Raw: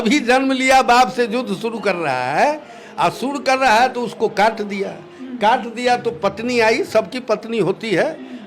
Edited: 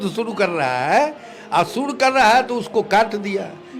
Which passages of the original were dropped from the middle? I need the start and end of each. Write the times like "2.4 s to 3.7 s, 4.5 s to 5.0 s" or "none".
none